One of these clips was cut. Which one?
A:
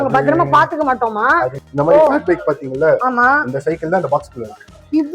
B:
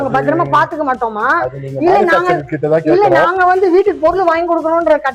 A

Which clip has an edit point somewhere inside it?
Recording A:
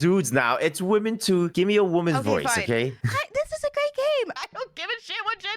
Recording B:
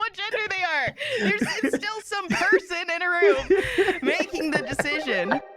A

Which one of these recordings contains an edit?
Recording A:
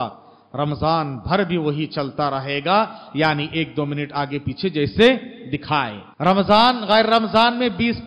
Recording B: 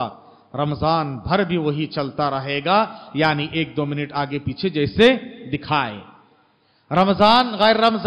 A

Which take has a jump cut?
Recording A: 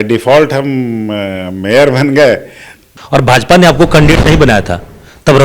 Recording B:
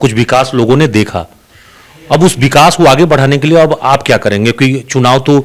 A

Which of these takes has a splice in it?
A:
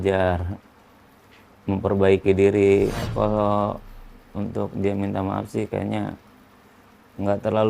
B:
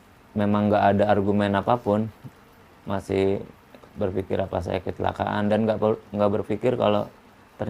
A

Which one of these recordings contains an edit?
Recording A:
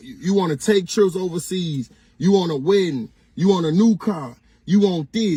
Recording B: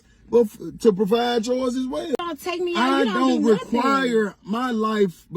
B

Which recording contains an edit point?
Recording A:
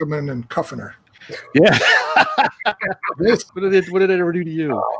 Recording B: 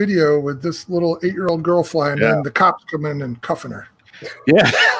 A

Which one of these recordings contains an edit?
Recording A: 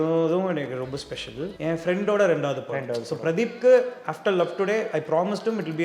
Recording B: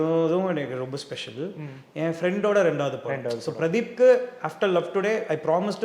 A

